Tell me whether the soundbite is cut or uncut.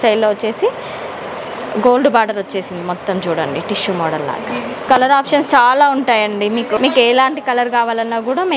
uncut